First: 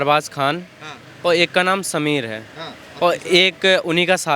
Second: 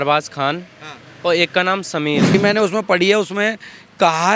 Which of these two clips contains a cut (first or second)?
second